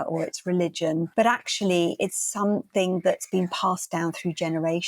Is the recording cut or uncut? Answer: cut